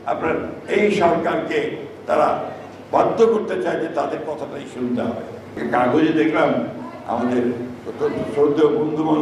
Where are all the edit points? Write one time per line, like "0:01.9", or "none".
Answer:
0:05.6